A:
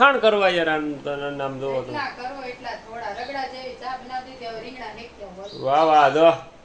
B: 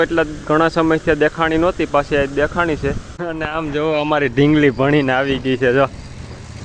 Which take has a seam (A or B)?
B